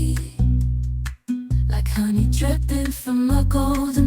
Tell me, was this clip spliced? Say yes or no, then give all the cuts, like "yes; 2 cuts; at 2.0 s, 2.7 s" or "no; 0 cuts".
yes; 1 cut; at 2.6 s